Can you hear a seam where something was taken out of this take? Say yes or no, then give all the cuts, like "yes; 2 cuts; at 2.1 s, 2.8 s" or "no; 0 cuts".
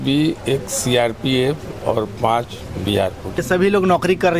yes; 1 cut; at 3.4 s